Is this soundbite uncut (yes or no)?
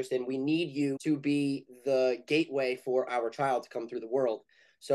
no